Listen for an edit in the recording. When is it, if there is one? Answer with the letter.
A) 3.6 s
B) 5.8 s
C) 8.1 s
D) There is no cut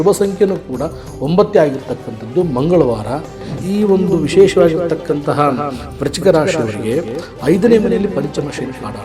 A